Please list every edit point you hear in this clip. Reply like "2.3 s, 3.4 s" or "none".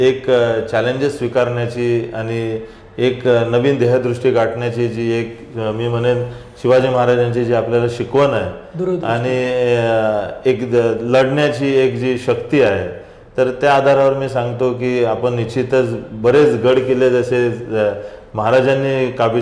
none